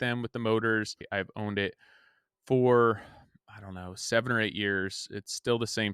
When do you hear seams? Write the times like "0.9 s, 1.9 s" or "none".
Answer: 1.1 s

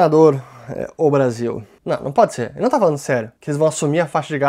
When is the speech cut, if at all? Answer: 1.7 s, 3.4 s

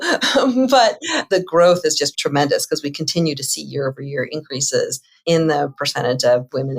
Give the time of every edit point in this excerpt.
1.1 s, 2.1 s, 5.1 s

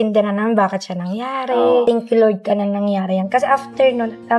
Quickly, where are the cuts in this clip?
1.8 s

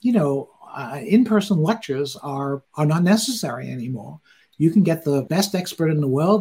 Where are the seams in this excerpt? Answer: 5.3 s

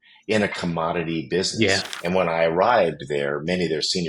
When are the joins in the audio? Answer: 1.9 s

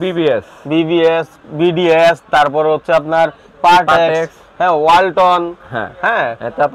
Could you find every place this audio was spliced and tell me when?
none

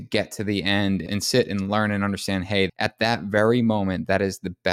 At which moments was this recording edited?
1.1 s, 2.7 s

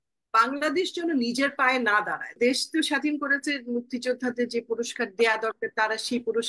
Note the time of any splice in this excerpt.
2.4 s

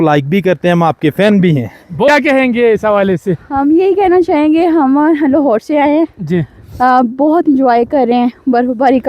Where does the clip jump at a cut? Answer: 2.1 s

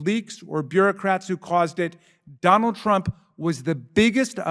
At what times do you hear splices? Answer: none

